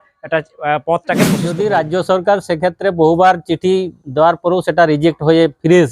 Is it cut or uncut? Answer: cut